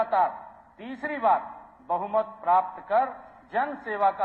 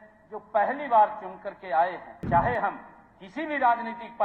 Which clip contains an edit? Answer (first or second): second